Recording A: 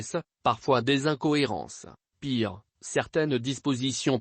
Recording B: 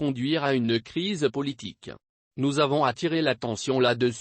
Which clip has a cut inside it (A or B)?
A